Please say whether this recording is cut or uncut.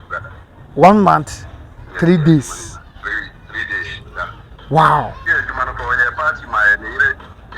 cut